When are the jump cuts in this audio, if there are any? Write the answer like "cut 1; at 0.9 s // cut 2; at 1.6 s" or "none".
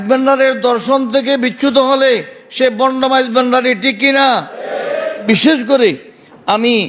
cut 1; at 5.2 s